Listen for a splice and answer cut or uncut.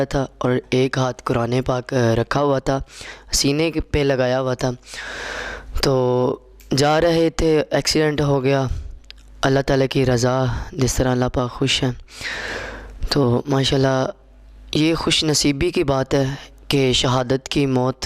uncut